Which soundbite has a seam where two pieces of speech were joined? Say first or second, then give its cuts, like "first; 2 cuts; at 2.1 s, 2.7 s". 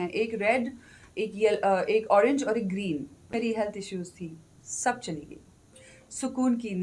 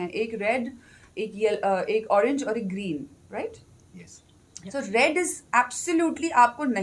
first; 1 cut; at 3.3 s